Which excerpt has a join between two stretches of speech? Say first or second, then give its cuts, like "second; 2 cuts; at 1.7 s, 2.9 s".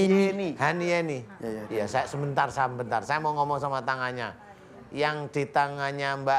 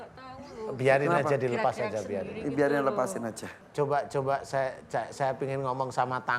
second; 1 cut; at 3.5 s